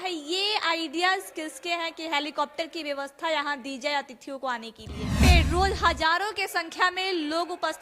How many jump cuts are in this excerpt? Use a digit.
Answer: 1